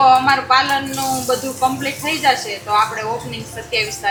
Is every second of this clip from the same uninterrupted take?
yes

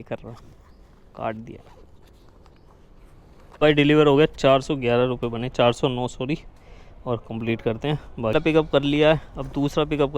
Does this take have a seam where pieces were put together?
yes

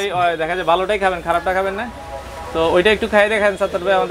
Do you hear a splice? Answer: no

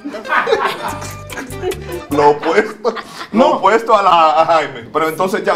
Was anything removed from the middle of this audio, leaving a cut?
yes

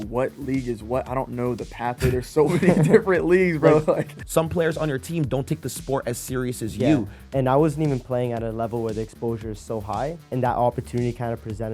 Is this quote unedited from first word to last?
no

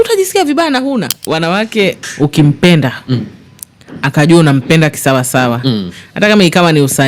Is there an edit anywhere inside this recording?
yes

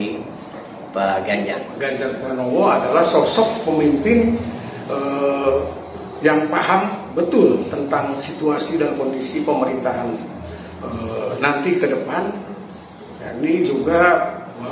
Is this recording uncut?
no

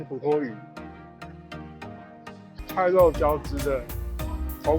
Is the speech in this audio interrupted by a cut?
yes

